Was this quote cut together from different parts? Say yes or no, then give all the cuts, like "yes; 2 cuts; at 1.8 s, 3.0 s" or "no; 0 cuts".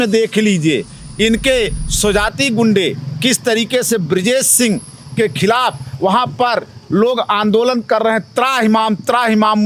no; 0 cuts